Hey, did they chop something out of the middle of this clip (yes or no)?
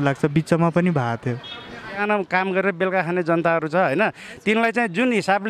yes